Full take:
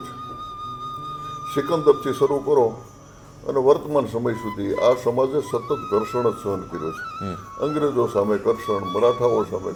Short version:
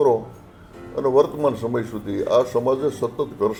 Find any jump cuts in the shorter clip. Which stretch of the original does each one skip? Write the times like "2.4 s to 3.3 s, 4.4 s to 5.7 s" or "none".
none